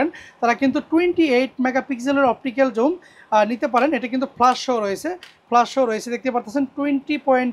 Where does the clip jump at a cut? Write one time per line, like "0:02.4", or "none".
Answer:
none

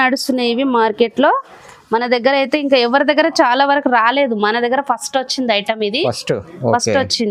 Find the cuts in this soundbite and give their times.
none

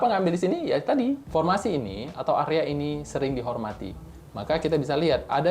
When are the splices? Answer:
0:01.2

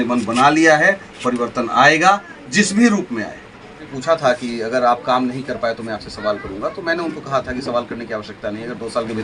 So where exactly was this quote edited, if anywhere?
0:03.9

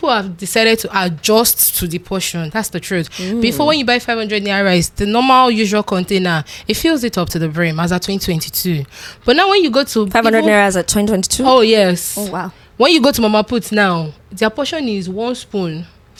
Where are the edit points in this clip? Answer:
none

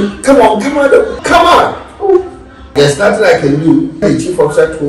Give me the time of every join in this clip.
0:01.1
0:02.7
0:04.0

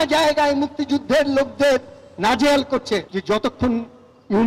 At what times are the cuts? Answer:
none

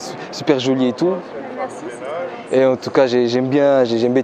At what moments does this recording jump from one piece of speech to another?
none

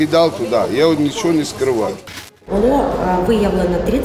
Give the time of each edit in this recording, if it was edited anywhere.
0:02.2

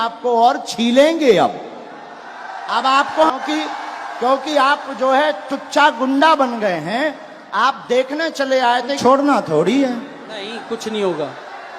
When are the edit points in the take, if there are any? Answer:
0:03.3
0:09.0

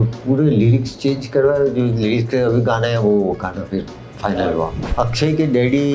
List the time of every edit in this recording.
0:04.8

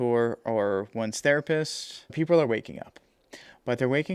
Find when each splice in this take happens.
0:02.1

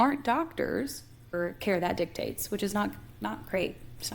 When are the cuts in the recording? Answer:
0:01.3

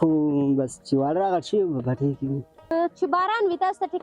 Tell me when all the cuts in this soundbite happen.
0:02.7

